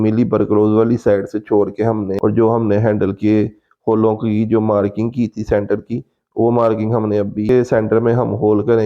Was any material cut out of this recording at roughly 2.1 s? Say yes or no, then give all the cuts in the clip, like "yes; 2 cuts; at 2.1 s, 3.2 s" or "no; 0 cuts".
yes; 2 cuts; at 2.1 s, 7.5 s